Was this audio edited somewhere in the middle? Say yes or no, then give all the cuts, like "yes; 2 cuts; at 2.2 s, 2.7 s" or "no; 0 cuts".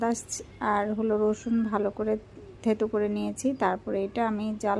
no; 0 cuts